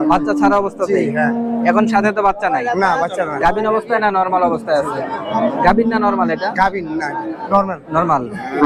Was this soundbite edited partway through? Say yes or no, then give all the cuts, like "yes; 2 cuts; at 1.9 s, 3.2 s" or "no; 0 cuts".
no; 0 cuts